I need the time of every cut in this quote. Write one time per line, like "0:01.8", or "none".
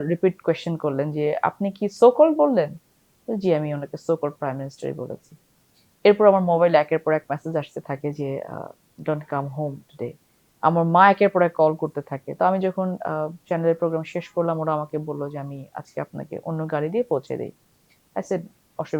none